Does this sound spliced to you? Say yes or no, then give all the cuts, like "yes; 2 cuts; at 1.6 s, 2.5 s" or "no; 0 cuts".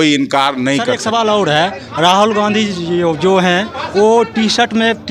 yes; 1 cut; at 1.0 s